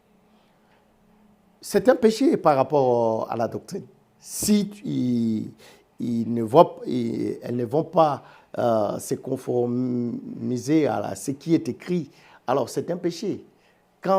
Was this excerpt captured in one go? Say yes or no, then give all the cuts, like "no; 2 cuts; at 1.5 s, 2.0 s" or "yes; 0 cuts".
yes; 0 cuts